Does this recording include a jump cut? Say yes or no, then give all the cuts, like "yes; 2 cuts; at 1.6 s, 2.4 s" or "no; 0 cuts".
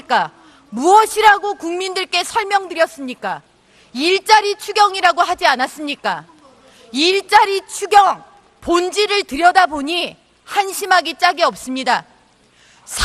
no; 0 cuts